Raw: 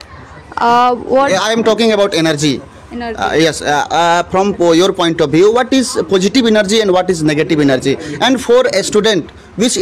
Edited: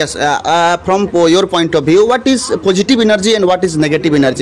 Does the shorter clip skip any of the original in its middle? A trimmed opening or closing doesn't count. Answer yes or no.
no